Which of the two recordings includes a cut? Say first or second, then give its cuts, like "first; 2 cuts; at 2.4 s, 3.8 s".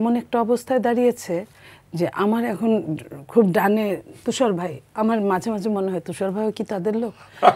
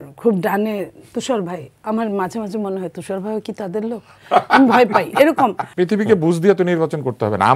second; 1 cut; at 5.6 s